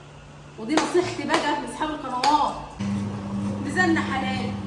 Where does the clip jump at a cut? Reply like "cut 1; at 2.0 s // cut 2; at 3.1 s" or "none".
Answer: cut 1; at 2.7 s

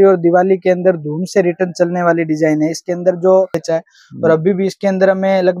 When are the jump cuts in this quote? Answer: cut 1; at 3.6 s

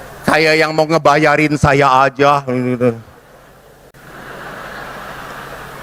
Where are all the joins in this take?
cut 1; at 3.9 s

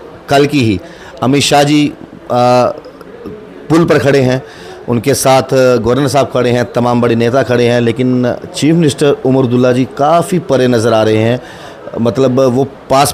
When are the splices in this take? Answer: none

